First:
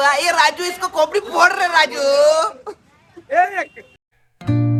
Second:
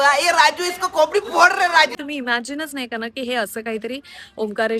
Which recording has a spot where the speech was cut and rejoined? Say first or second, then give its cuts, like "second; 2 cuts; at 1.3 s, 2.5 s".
second; 1 cut; at 1.9 s